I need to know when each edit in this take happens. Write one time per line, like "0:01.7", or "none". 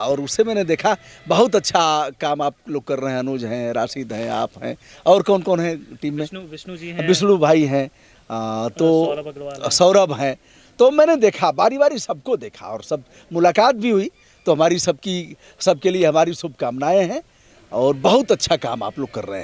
none